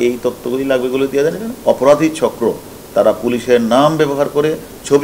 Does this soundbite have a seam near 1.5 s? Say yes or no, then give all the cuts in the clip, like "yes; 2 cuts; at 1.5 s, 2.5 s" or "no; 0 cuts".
yes; 1 cut; at 1.5 s